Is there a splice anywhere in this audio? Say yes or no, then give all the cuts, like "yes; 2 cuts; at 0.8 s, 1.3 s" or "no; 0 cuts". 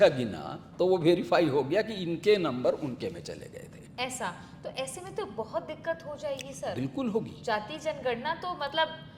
no; 0 cuts